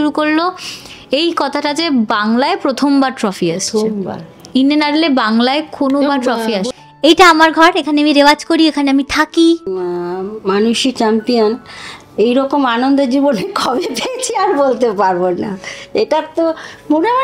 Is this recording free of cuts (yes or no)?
no